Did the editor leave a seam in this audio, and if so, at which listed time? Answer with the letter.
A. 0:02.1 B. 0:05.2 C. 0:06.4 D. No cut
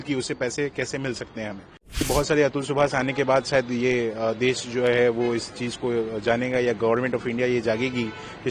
A